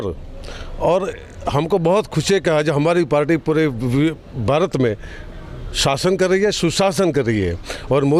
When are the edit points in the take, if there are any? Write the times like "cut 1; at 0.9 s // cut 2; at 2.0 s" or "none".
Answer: none